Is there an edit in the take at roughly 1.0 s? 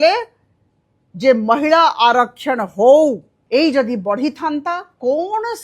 no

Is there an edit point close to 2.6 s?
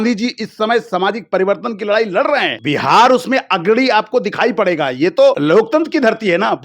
yes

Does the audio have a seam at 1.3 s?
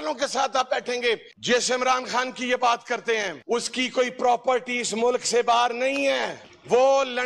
yes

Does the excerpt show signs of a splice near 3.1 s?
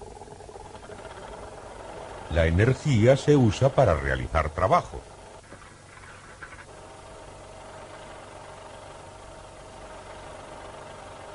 yes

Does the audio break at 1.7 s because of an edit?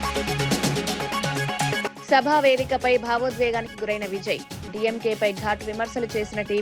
yes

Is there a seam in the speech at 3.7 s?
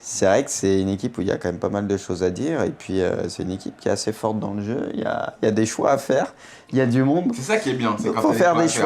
no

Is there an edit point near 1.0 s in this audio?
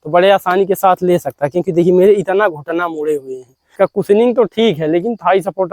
no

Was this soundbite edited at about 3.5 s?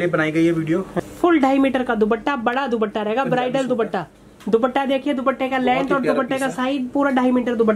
no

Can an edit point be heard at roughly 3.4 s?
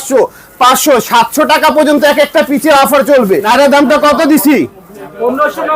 yes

